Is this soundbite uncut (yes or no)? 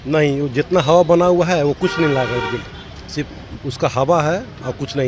yes